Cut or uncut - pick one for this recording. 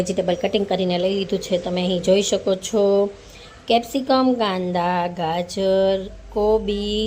uncut